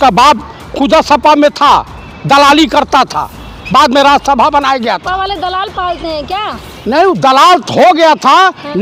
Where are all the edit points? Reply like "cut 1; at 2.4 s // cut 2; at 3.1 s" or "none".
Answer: none